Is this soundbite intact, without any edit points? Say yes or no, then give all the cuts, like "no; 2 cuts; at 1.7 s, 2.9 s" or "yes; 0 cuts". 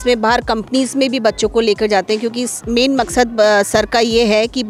yes; 0 cuts